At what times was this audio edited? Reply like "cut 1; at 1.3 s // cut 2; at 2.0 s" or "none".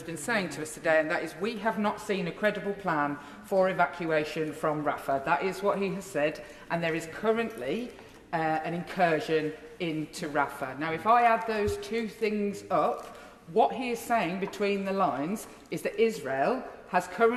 none

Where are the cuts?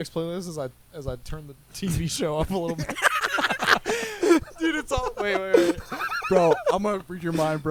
none

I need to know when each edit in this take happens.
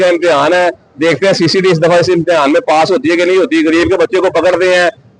none

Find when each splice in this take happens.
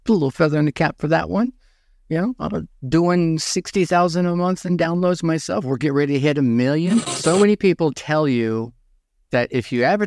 cut 1; at 7.1 s

